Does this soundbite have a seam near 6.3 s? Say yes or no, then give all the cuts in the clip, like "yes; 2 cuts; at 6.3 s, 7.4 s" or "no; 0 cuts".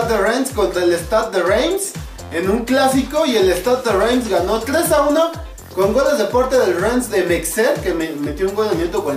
yes; 1 cut; at 6.3 s